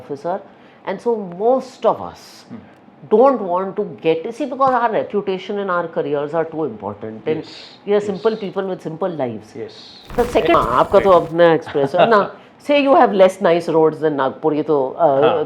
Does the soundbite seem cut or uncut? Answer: cut